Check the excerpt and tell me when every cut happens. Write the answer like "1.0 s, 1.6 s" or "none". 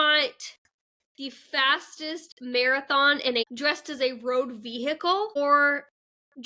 3.4 s, 5.4 s